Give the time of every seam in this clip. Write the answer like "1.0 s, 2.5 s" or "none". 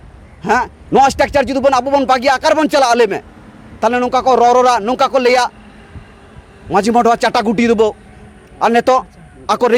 none